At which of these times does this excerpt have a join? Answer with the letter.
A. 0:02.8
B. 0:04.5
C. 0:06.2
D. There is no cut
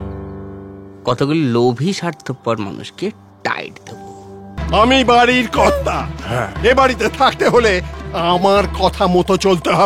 B